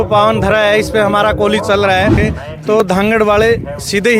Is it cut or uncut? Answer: cut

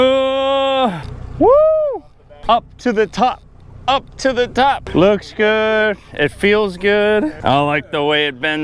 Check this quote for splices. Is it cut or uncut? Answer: cut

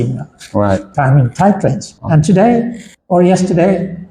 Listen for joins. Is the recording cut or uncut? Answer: uncut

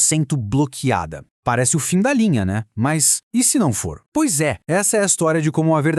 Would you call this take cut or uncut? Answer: uncut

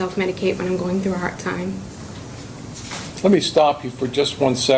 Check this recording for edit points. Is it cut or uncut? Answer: uncut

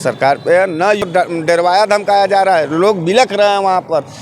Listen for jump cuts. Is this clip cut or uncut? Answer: cut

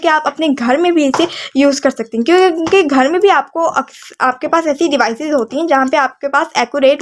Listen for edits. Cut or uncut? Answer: uncut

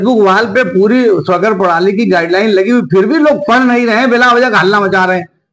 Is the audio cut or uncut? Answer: uncut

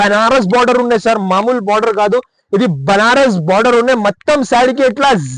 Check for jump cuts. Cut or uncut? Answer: uncut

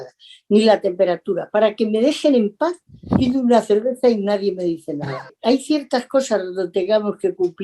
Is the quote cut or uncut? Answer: cut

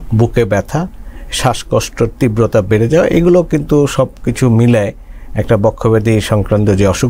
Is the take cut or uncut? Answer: uncut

